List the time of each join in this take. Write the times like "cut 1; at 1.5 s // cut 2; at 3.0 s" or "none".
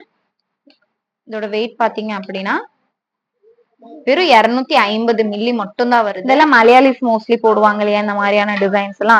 cut 1; at 6.2 s